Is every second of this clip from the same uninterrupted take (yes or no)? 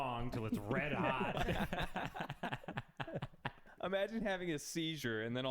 no